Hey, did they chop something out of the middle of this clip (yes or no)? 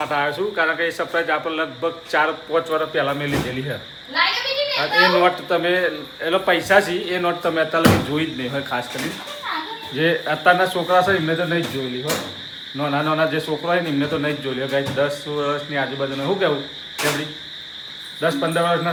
no